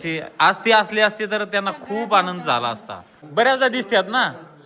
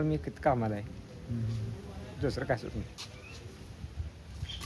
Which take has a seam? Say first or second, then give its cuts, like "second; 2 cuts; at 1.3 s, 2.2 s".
first; 1 cut; at 3.2 s